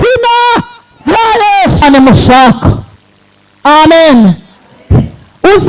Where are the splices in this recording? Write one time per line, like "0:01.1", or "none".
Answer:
0:01.8